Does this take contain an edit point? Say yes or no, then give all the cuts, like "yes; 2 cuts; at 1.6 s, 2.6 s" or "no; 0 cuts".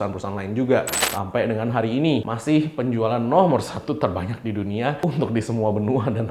yes; 3 cuts; at 1.0 s, 2.3 s, 5.0 s